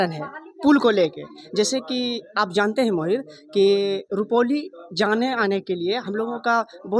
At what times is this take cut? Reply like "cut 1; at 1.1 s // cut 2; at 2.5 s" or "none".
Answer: none